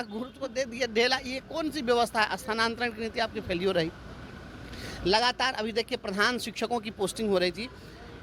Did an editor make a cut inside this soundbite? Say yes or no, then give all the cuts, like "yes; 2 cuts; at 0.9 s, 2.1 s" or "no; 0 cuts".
no; 0 cuts